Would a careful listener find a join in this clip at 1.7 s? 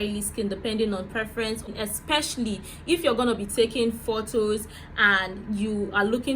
yes; 1 cut; at 1.7 s

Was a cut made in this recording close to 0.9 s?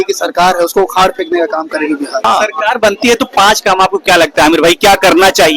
no; 1 cut; at 2.2 s

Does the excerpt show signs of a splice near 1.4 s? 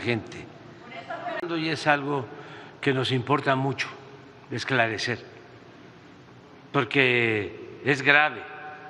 yes; 1 cut; at 1.4 s

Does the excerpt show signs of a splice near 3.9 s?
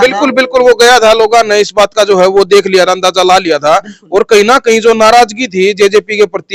no; 0 cuts

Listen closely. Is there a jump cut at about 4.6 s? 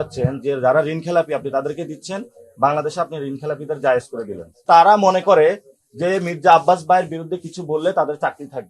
yes; 1 cut; at 4.6 s

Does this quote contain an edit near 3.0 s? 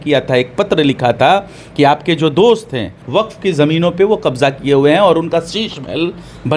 yes; 1 cut; at 3.0 s

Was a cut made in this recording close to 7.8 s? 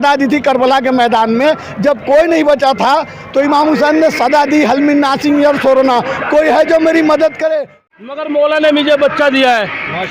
yes; 1 cut; at 7.8 s

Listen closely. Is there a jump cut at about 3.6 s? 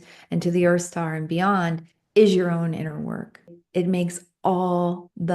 yes; 1 cut; at 3.6 s

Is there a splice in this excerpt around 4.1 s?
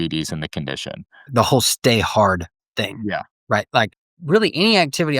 yes; 2 cuts; at 1.2 s, 4.1 s

